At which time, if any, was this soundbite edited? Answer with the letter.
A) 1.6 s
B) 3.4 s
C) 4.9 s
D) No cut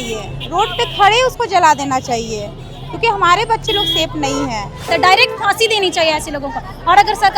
C